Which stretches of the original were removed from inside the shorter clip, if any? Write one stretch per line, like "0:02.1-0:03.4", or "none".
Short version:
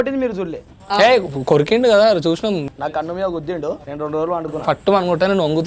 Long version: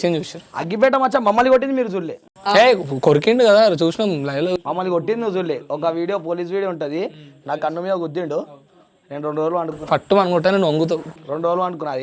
0:04.2-0:07.4
0:08.5-0:09.1